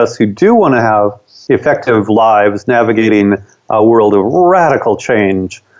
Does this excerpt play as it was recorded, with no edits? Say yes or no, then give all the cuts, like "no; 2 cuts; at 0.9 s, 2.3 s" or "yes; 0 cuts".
yes; 0 cuts